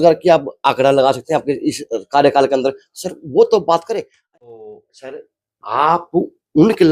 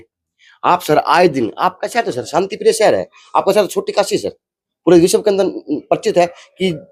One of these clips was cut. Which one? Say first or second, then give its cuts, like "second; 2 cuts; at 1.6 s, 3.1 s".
first; 1 cut; at 4.1 s